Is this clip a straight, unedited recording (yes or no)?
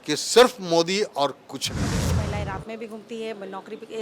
no